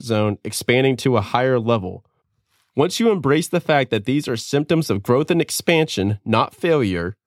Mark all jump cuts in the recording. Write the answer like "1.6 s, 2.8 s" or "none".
none